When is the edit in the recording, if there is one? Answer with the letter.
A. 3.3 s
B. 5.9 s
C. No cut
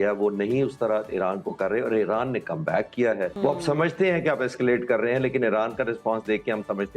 A